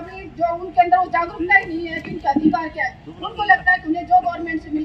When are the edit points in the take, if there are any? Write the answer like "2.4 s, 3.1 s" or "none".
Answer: none